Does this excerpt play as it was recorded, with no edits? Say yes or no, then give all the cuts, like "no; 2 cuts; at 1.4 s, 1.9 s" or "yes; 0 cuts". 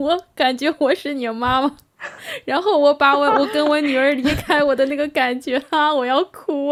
yes; 0 cuts